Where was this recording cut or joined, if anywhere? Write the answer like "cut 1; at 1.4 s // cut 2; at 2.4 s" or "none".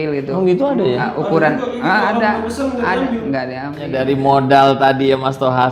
cut 1; at 3.9 s